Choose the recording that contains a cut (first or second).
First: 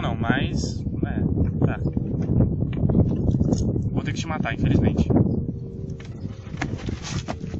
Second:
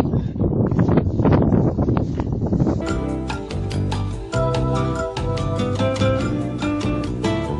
second